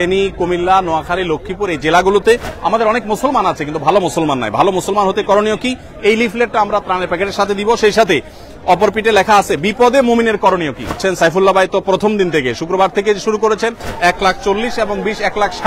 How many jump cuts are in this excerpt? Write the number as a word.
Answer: three